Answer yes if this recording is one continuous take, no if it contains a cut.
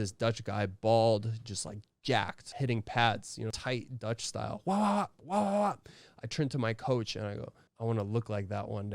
no